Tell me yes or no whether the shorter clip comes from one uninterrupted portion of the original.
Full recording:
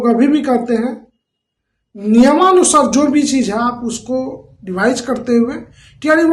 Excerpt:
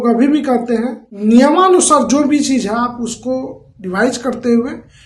no